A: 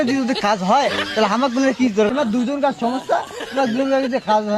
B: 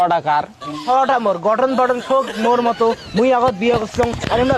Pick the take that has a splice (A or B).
A